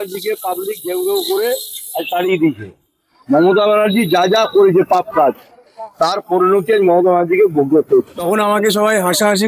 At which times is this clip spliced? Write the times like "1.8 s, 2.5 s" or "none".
8.2 s